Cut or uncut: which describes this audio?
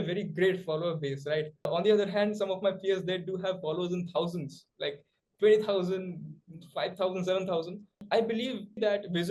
uncut